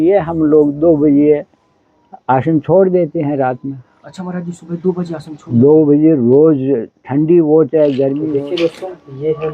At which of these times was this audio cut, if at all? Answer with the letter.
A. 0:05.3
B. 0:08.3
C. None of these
B